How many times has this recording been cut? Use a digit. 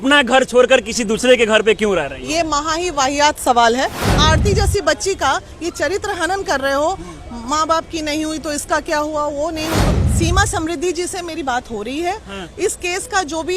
2